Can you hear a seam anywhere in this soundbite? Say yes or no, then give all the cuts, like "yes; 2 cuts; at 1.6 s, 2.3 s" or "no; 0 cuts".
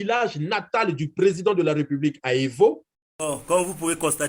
yes; 1 cut; at 3.1 s